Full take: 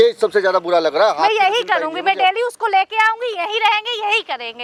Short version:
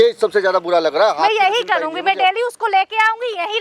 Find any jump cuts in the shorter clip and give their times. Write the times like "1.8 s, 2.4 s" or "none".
none